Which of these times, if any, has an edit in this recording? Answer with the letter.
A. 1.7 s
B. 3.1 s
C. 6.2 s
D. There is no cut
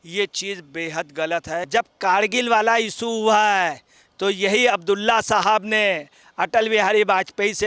A